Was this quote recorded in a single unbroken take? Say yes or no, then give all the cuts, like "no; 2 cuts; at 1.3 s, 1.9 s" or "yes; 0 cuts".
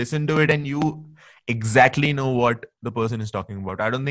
yes; 0 cuts